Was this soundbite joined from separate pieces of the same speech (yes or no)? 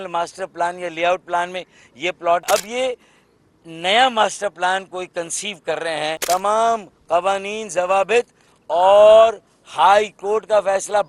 yes